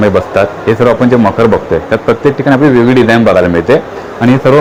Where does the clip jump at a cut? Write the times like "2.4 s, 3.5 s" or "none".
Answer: none